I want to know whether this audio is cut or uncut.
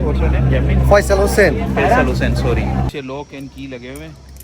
cut